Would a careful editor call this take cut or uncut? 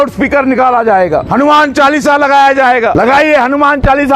cut